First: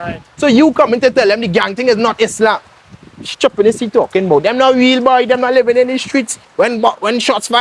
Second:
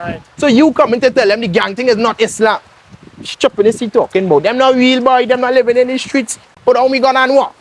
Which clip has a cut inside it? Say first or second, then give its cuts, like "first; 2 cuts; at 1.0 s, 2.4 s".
second; 1 cut; at 6.5 s